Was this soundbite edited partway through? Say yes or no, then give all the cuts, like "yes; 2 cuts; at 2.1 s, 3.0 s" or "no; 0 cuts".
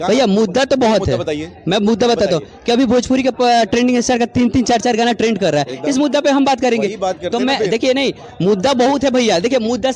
no; 0 cuts